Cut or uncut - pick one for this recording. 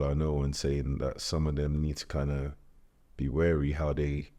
uncut